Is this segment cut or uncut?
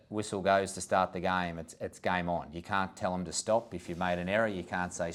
uncut